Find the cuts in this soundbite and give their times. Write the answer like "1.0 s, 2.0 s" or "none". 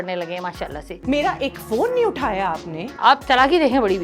2.8 s